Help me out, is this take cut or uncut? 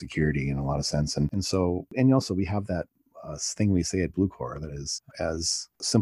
uncut